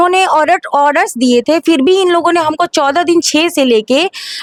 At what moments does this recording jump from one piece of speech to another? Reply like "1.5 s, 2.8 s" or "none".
none